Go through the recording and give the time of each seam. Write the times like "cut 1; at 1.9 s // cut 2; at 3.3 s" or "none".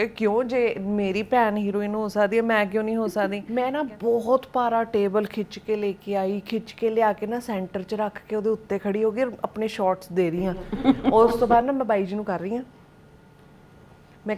cut 1; at 3.4 s